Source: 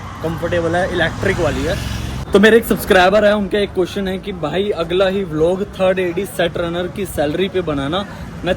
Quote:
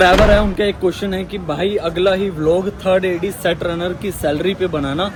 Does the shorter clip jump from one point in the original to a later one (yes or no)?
no